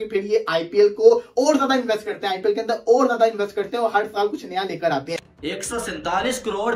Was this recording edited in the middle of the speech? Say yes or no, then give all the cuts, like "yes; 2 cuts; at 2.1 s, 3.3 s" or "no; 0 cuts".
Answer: yes; 1 cut; at 5.1 s